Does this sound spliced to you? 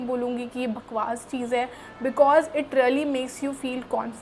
no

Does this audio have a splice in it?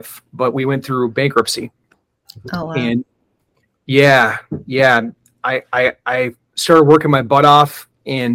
no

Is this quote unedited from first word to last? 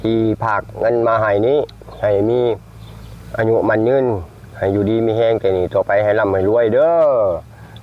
yes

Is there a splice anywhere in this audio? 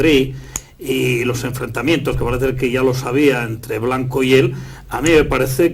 no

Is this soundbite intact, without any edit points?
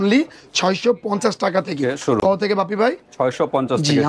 yes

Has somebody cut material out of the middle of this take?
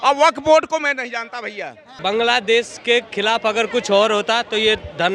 yes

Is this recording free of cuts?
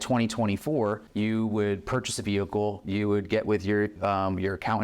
no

